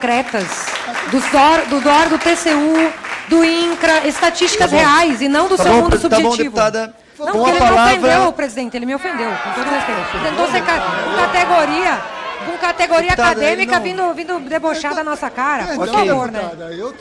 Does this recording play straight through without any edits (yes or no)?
yes